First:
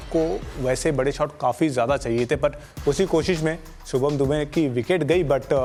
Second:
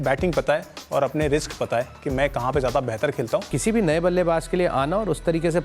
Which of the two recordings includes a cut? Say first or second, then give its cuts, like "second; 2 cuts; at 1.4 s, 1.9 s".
second; 1 cut; at 3.5 s